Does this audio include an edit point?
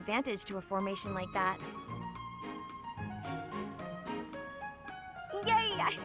yes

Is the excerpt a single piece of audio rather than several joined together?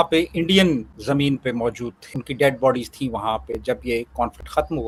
yes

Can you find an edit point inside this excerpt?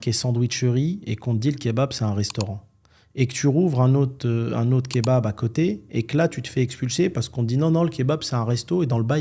no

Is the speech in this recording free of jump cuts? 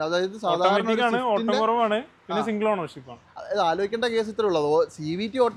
yes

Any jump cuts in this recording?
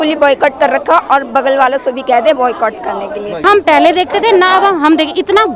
yes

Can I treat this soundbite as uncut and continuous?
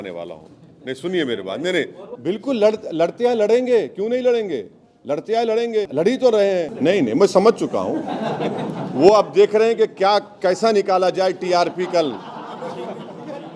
no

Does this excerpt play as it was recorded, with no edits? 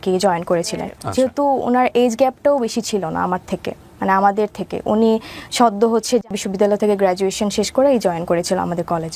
no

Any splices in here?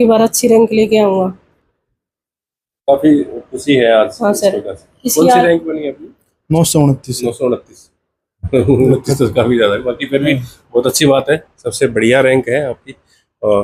no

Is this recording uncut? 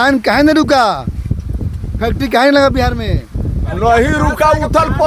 no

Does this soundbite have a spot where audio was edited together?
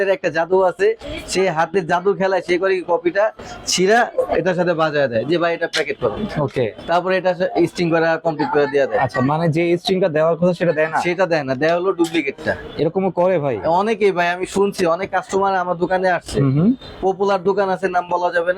no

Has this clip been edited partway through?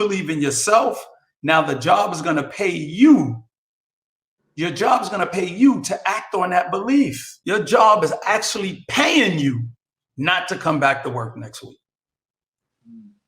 yes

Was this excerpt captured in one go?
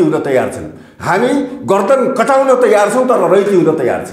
yes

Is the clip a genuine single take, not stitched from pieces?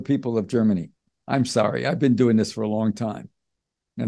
no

